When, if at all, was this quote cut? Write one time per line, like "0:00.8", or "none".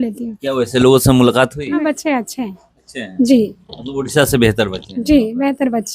0:01.8